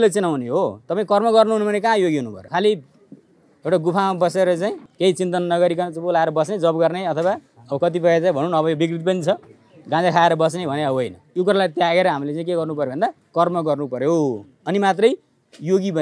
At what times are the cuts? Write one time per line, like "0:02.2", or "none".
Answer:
0:02.4
0:04.9
0:11.2
0:13.2